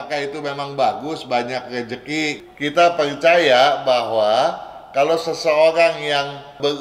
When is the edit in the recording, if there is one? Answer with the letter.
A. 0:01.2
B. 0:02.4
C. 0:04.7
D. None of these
B